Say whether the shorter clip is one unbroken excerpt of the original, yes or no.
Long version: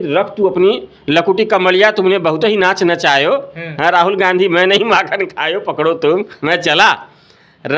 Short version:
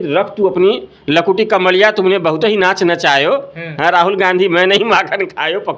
yes